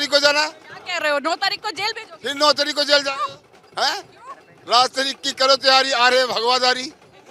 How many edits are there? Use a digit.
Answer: 0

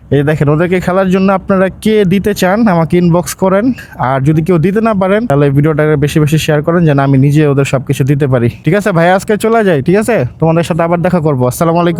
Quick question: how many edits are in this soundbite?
0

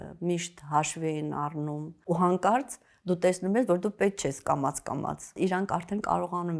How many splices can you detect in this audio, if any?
2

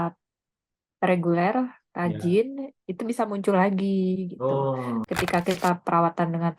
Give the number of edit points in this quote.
1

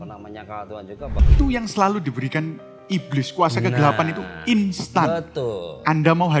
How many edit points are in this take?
1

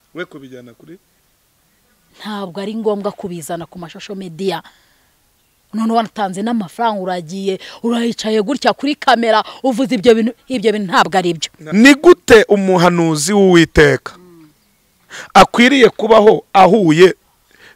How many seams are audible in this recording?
1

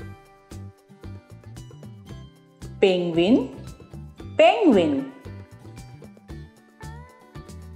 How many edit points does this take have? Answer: 0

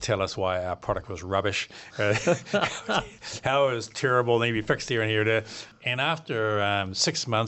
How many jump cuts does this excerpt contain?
1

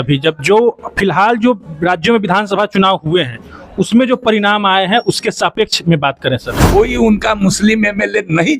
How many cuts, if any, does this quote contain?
1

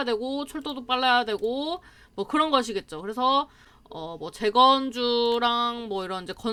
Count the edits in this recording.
0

